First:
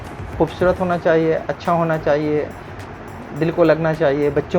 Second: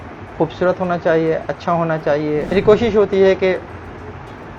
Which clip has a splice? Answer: second; 1 cut; at 2.5 s

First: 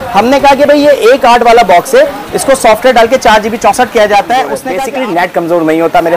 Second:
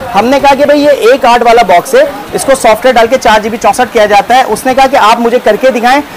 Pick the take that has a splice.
first; 1 cut; at 4.7 s

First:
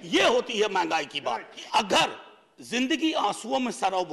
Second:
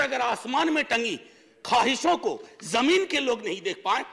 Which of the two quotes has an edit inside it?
first; 1 cut; at 1.5 s

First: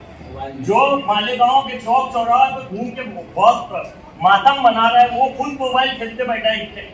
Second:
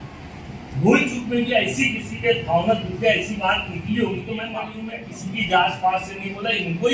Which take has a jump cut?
second; 1 cut; at 4.8 s

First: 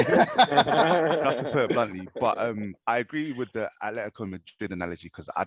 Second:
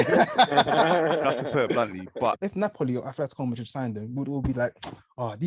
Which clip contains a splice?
second; 1 cut; at 2.4 s

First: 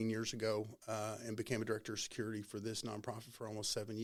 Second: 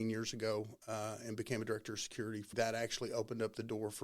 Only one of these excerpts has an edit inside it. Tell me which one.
second; 1 cut; at 2.5 s

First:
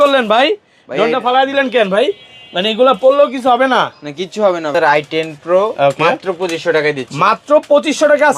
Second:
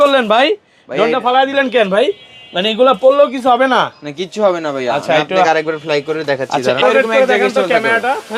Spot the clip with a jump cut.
first; 1 cut; at 4.7 s

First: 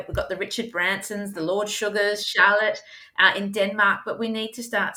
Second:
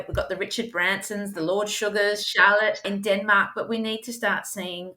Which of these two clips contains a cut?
second; 1 cut; at 2.9 s

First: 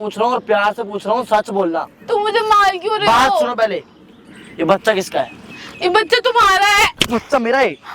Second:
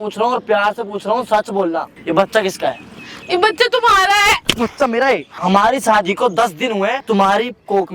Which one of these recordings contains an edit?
second; 3 cuts; at 1.9 s, 5.3 s, 7.0 s

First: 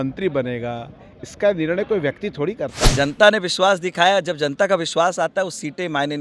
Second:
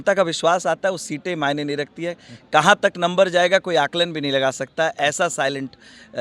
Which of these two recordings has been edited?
first; 1 cut; at 2.8 s

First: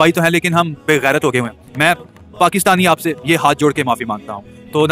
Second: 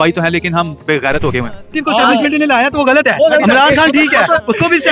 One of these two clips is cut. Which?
second; 1 cut; at 1.7 s

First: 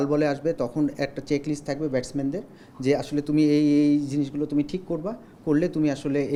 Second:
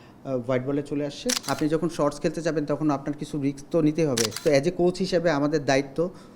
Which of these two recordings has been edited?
second; 2 cuts; at 1.4 s, 4.3 s

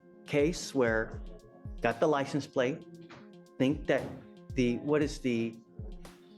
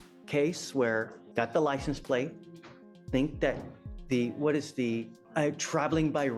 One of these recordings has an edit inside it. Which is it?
second; 2 cuts; at 1.2 s, 5.2 s

